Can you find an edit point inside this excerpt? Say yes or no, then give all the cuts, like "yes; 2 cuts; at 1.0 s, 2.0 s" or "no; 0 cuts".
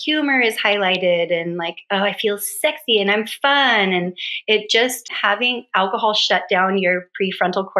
yes; 1 cut; at 5.1 s